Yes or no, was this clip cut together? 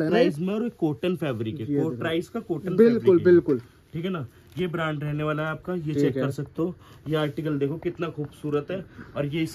no